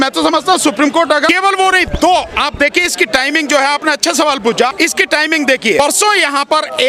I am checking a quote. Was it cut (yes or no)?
yes